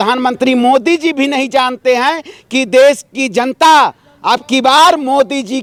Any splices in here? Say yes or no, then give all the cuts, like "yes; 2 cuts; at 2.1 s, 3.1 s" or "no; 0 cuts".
no; 0 cuts